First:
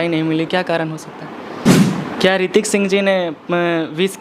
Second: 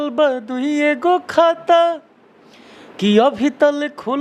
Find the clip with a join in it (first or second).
first